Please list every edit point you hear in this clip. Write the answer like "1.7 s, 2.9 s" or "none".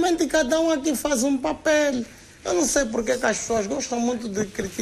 2.1 s